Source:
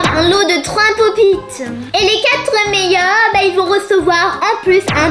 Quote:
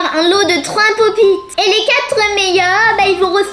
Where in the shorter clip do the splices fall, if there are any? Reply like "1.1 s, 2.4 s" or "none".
1.5 s